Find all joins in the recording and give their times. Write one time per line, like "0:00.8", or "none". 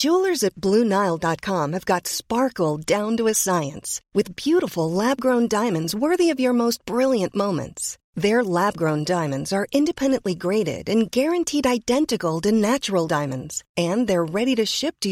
none